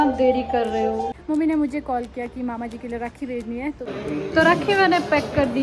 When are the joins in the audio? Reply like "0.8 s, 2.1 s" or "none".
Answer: 1.2 s, 3.9 s